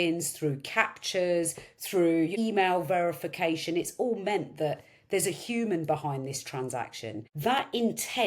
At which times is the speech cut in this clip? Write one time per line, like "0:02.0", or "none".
0:02.3
0:07.3